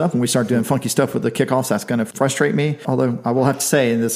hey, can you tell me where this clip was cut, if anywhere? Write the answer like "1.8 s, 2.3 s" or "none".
2.1 s, 2.8 s